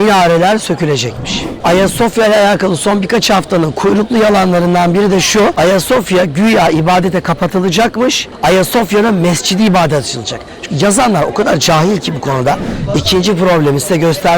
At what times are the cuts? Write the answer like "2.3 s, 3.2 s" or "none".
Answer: 1.6 s, 5.5 s, 8.3 s, 12.7 s